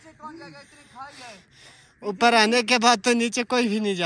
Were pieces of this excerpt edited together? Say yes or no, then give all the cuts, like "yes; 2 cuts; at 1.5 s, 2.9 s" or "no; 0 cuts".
no; 0 cuts